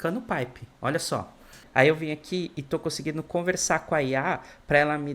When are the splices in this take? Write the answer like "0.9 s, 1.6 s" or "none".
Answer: 1.6 s